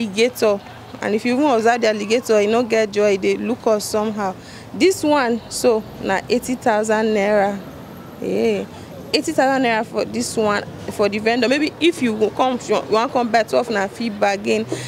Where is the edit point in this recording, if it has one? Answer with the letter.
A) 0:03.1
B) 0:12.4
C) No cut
C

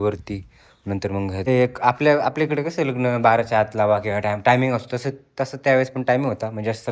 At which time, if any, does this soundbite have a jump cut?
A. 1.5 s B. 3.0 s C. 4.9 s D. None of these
A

